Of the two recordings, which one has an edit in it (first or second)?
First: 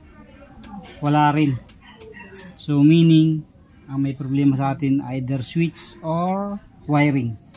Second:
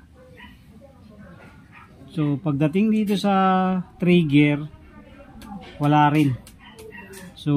first